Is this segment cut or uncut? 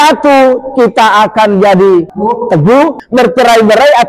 cut